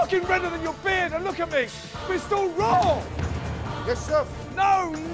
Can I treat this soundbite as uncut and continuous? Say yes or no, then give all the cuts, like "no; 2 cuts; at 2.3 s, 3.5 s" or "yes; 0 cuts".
yes; 0 cuts